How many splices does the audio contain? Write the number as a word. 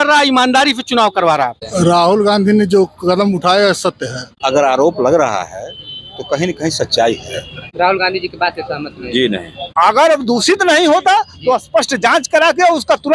four